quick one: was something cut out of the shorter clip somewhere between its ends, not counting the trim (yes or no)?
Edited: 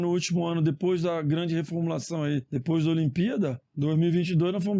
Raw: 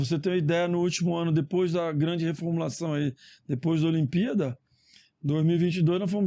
yes